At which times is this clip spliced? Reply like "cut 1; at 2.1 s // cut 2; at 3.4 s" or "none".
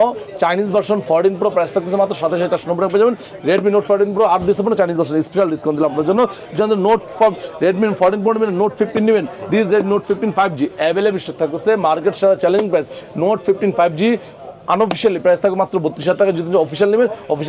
none